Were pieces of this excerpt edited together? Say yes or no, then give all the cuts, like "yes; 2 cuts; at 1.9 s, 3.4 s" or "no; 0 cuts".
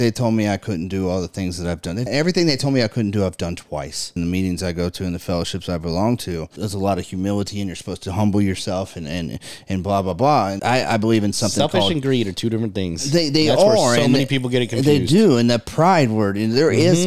yes; 4 cuts; at 2.1 s, 4.1 s, 6.5 s, 10.6 s